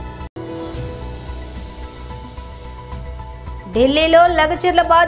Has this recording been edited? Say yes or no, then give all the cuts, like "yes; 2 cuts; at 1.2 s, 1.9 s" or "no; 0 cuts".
no; 0 cuts